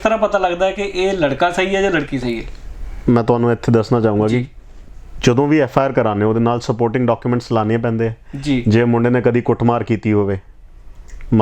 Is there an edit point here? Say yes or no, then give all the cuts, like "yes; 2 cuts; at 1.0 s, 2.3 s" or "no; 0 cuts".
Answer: no; 0 cuts